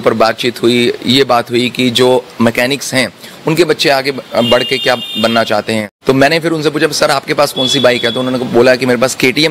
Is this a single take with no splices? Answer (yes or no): no